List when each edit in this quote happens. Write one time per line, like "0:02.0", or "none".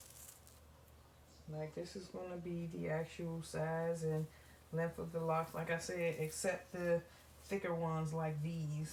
none